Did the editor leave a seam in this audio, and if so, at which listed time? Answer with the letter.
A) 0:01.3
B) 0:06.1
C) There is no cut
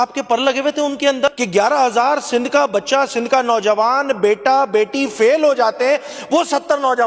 A